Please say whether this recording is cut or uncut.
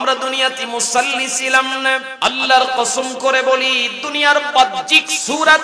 cut